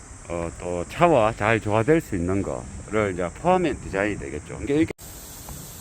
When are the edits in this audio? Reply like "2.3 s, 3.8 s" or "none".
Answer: 4.9 s